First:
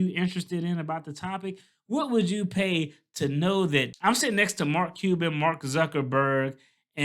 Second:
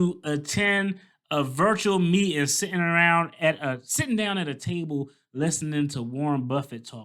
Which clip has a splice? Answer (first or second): first